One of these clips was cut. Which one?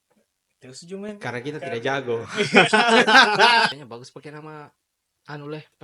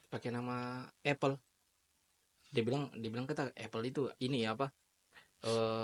first; 1 cut; at 3.8 s

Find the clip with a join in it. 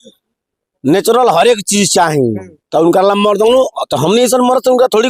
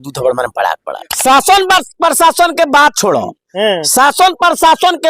second; 1 cut; at 1.0 s

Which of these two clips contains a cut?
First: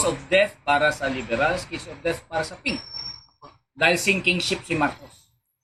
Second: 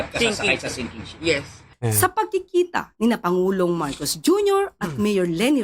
second; 1 cut; at 1.7 s

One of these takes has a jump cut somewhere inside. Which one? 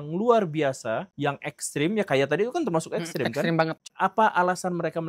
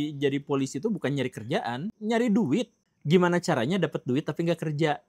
first; 1 cut; at 3.8 s

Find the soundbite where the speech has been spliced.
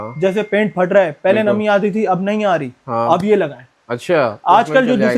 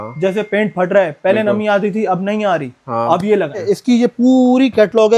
second; 1 cut; at 3.6 s

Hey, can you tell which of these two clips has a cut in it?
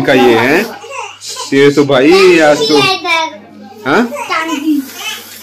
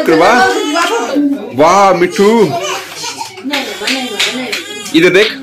second; 1 cut; at 1.1 s

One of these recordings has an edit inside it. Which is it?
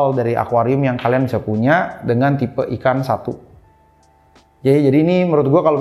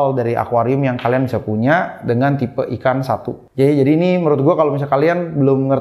second; 1 cut; at 3.4 s

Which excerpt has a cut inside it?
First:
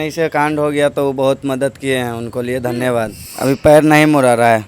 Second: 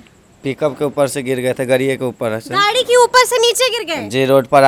first; 1 cut; at 3.2 s

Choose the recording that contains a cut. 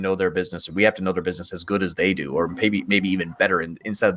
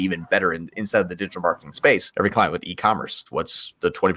second; 2 cuts; at 2.1 s, 3.2 s

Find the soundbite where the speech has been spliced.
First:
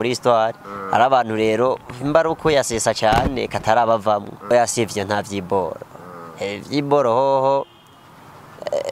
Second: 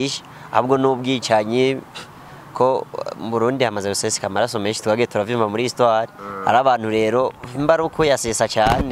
first; 1 cut; at 4.5 s

